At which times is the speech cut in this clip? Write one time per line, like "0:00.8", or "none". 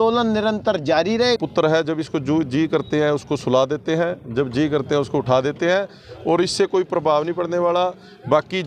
0:01.4